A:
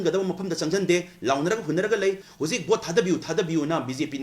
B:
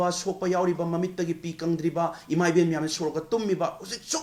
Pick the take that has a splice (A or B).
A